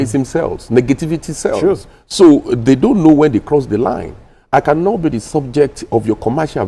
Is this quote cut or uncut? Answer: uncut